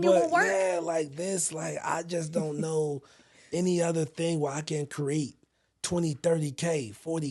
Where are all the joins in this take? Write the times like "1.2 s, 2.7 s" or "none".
none